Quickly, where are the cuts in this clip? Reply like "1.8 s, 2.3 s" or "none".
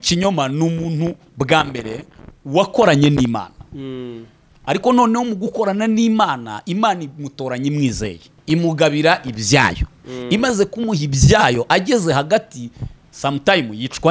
8.3 s